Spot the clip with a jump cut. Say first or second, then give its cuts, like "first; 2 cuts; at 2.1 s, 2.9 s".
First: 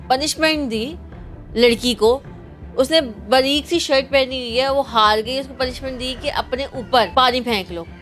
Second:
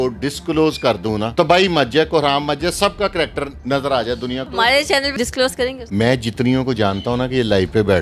second; 4 cuts; at 1.3 s, 3.6 s, 4.5 s, 5.8 s